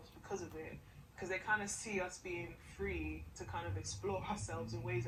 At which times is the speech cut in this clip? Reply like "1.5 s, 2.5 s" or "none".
none